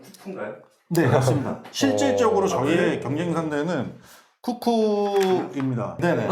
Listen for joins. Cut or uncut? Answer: uncut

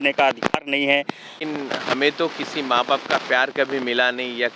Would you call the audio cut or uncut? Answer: cut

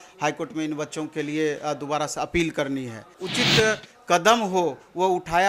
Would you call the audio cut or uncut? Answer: cut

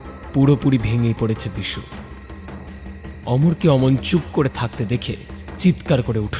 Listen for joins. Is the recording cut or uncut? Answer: cut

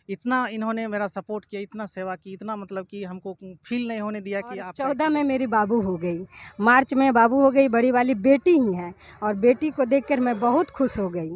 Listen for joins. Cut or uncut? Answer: cut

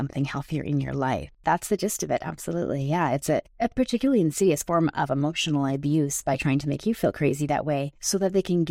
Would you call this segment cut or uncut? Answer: cut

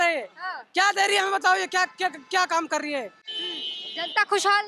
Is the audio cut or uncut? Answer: uncut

